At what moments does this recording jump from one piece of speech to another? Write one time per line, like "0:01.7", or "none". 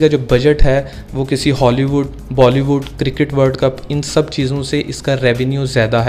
none